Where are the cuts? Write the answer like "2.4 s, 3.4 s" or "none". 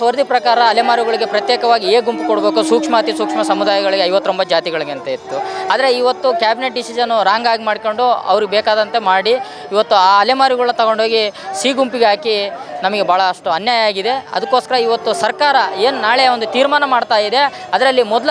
none

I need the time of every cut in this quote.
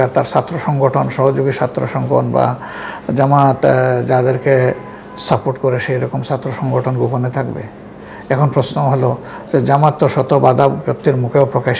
none

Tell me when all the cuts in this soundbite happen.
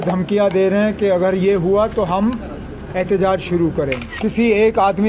4.1 s

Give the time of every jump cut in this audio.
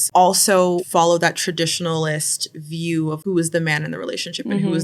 3.2 s

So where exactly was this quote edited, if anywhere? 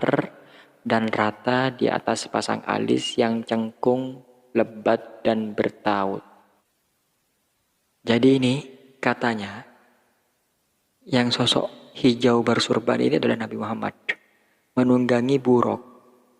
6.6 s

